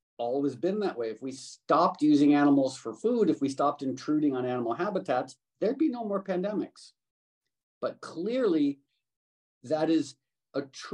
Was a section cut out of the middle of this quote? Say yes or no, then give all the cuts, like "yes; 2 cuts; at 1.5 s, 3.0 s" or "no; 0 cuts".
no; 0 cuts